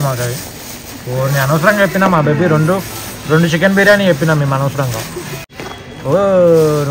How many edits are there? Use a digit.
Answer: 1